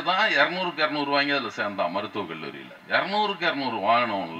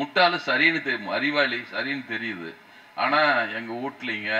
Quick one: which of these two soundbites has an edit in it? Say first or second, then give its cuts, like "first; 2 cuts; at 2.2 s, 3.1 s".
first; 1 cut; at 2.7 s